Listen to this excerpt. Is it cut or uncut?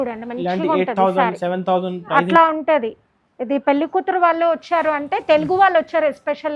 uncut